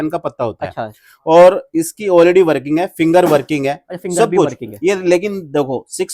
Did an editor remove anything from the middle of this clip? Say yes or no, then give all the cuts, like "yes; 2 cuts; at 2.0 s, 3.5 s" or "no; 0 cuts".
no; 0 cuts